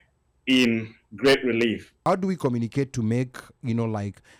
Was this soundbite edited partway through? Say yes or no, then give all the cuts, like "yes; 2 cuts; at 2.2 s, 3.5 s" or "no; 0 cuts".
yes; 1 cut; at 2.0 s